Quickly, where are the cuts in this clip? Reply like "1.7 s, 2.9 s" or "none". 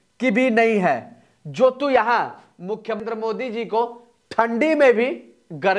3.0 s